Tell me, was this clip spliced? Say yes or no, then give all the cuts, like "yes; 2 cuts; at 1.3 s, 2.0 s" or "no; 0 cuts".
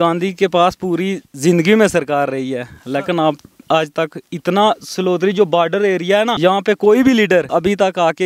yes; 2 cuts; at 6.3 s, 7.5 s